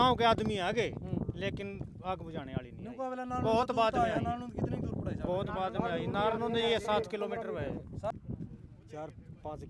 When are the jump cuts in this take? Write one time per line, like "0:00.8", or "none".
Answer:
0:08.1